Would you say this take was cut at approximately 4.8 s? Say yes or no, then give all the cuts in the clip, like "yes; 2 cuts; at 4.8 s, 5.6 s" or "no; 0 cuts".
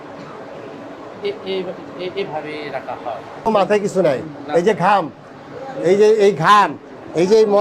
no; 1 cut; at 3.5 s